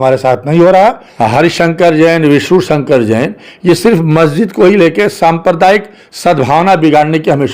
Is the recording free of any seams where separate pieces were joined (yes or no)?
no